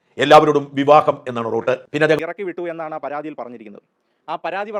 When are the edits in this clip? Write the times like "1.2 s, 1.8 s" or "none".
2.2 s